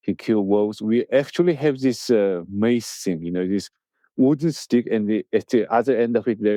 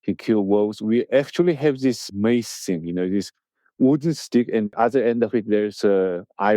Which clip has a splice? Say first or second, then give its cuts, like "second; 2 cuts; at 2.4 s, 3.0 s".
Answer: second; 2 cuts; at 2.0 s, 4.7 s